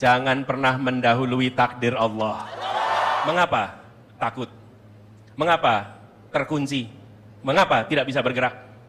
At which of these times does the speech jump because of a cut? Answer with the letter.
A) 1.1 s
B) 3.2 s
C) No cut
B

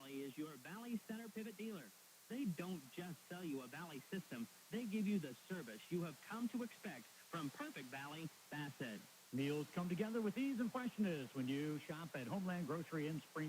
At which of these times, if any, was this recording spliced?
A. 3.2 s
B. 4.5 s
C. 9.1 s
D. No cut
C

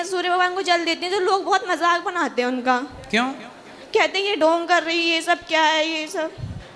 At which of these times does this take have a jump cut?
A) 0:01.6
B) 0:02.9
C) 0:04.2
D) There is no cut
D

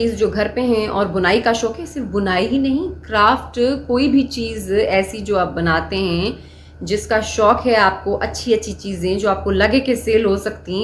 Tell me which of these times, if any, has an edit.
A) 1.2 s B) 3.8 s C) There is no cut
C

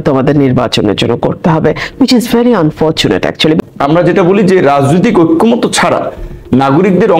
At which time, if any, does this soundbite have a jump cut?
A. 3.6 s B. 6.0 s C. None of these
A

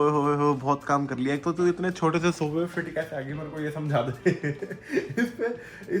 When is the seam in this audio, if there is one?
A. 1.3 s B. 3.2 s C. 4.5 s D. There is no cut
D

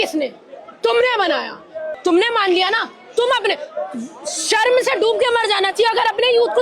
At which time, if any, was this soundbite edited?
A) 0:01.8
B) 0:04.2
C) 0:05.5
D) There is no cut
A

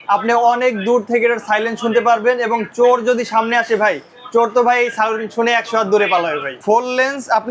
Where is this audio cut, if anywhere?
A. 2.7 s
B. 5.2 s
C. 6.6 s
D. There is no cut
C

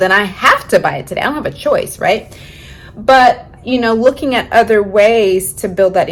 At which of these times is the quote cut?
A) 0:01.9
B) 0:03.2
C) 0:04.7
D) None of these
D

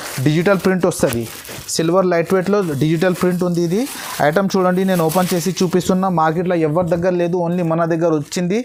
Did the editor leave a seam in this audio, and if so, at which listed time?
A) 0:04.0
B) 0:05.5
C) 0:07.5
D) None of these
D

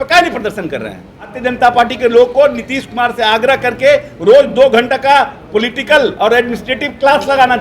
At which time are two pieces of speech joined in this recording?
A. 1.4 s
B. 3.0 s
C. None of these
A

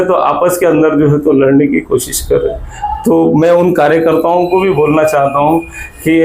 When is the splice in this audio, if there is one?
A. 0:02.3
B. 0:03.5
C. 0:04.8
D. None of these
D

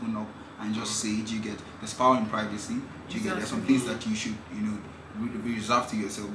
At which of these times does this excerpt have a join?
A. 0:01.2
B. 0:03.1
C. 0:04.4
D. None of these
D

